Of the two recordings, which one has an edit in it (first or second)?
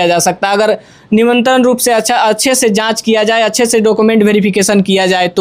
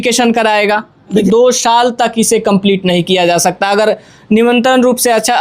second